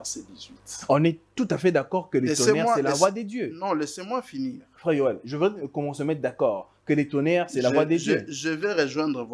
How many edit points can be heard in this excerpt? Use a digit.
0